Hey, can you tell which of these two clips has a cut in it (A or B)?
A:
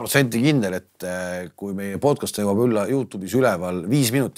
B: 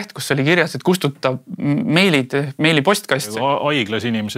B